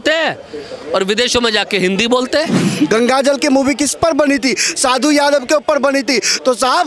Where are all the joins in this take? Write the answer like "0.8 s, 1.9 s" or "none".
2.7 s

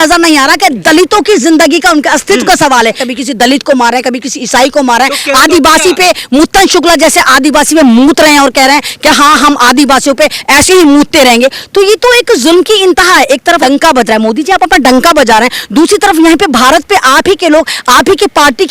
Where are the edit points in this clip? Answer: 3.0 s, 13.6 s

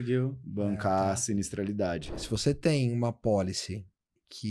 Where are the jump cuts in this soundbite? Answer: 2.2 s

